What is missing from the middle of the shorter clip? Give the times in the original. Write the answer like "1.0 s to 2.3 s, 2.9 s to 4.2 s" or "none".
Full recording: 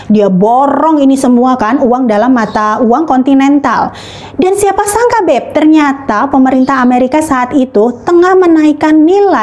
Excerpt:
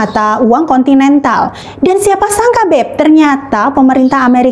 4.0 s to 4.2 s